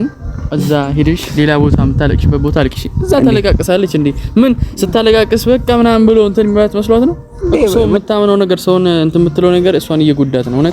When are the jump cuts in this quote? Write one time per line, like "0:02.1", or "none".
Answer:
0:07.7

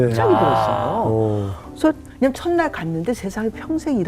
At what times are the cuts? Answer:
0:02.1

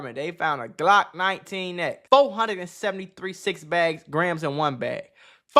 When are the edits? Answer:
0:02.0

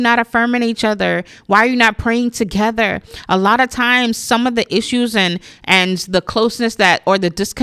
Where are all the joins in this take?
none

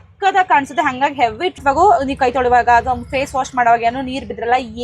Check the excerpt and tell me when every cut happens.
0:01.6

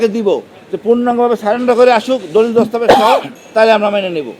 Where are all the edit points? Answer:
0:03.4

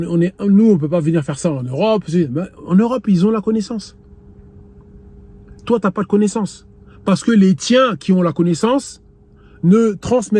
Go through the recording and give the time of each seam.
none

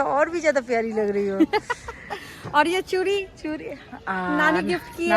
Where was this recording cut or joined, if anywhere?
none

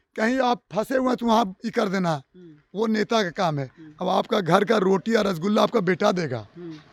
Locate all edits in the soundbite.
none

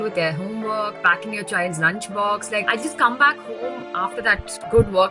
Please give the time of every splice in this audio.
0:02.7

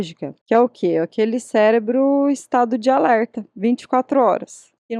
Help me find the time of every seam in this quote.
none

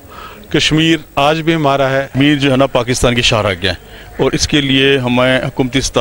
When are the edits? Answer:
0:02.1

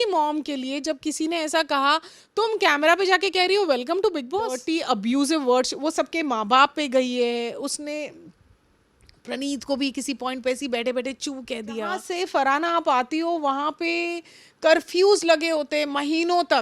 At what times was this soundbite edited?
0:04.6
0:12.0

